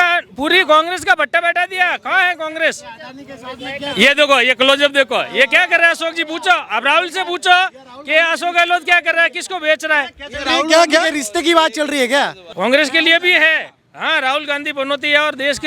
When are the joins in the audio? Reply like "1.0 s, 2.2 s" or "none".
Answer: 12.4 s